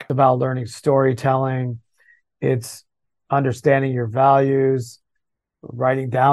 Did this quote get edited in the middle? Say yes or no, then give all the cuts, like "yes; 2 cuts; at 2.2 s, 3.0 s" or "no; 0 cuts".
no; 0 cuts